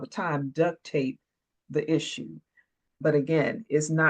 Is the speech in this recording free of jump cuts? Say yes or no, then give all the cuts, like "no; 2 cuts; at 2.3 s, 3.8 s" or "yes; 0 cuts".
no; 1 cut; at 3.0 s